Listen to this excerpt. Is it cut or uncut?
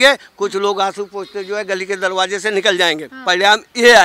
cut